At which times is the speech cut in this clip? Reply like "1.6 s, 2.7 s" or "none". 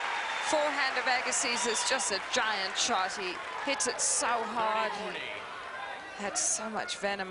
1.4 s